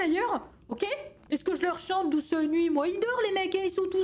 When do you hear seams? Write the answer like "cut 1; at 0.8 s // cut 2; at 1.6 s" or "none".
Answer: cut 1; at 1.1 s